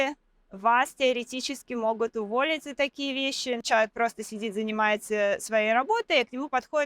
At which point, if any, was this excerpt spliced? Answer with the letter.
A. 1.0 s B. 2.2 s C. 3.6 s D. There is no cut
C